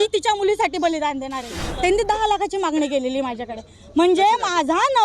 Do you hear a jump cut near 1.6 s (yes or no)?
yes